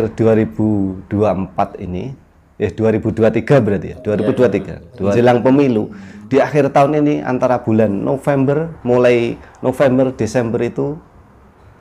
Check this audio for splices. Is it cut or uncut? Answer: cut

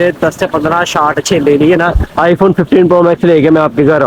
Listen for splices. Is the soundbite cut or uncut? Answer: uncut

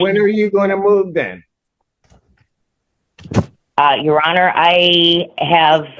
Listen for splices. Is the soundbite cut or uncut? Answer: uncut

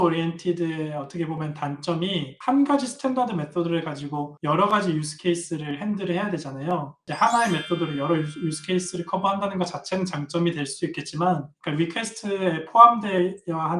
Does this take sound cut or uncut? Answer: cut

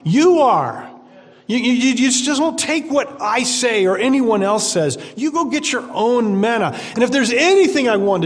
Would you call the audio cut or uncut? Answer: uncut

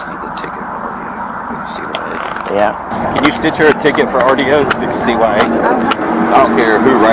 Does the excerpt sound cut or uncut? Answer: cut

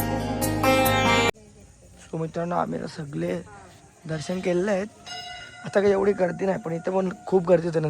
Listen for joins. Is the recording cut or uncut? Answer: cut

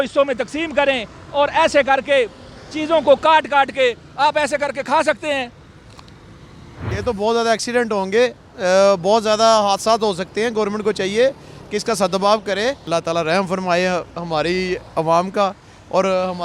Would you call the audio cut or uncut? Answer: cut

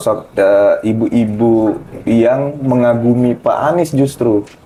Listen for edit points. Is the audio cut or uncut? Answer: uncut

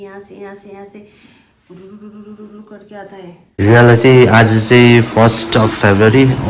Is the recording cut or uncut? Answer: cut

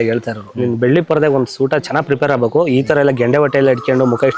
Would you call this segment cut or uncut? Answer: uncut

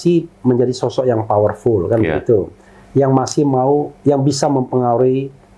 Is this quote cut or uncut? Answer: uncut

